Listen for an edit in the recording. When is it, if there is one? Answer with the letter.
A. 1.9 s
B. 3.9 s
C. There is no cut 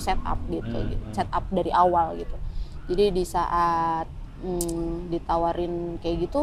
C